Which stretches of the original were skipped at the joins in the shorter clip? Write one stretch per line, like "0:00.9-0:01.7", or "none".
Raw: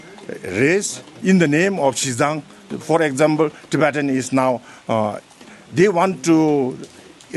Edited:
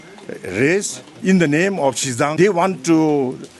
0:02.3-0:05.7